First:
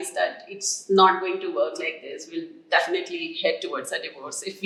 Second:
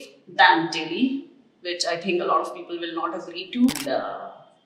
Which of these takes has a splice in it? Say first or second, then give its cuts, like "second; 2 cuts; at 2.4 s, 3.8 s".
second; 1 cut; at 3.7 s